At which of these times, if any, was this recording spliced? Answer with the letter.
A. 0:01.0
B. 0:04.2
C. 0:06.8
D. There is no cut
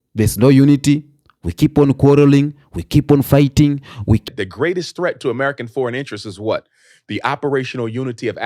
B